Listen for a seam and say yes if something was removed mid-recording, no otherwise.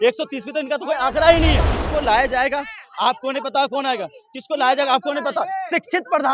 yes